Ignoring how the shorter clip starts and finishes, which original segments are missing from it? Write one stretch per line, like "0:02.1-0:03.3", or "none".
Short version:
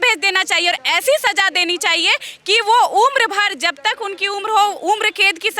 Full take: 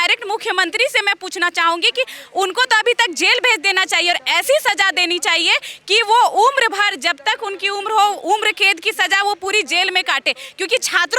none